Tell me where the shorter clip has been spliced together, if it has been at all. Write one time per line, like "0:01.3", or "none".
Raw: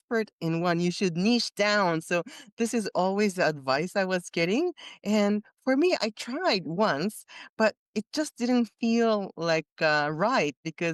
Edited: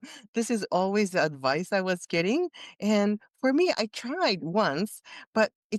none